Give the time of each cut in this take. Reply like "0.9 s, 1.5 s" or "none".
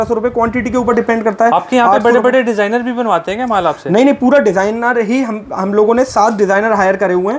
none